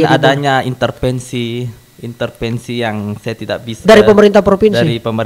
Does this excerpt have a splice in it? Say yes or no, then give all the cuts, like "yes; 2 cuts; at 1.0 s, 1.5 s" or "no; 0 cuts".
no; 0 cuts